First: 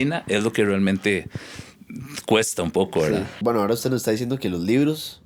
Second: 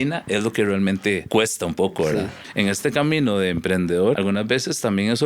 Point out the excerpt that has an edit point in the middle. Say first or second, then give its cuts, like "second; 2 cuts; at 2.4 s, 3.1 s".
second; 3 cuts; at 1.2 s, 2.3 s, 4.2 s